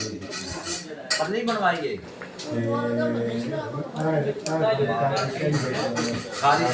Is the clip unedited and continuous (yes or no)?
no